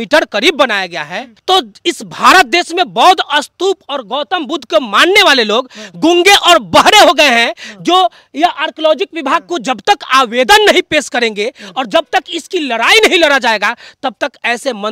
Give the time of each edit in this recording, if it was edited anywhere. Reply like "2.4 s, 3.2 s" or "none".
none